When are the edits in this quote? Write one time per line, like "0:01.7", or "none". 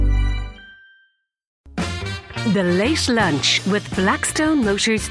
0:01.6